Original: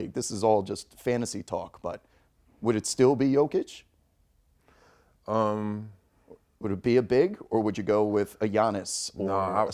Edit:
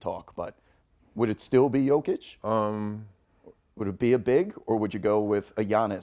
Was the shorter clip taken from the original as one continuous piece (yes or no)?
no